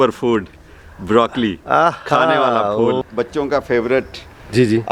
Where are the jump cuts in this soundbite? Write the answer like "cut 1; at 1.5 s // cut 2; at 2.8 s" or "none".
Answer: cut 1; at 3.0 s